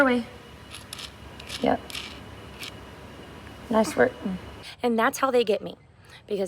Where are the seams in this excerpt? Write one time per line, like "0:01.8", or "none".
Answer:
0:04.7